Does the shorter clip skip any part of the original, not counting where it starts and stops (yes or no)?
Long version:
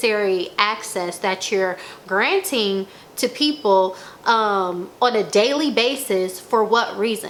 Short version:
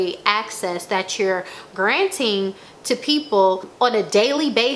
yes